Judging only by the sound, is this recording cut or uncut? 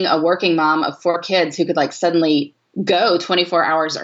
uncut